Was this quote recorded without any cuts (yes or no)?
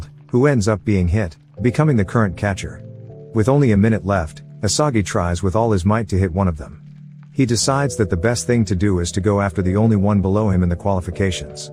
yes